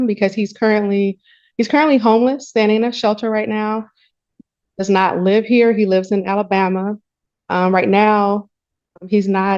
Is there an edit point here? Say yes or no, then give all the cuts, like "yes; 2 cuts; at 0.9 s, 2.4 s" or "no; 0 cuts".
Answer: no; 0 cuts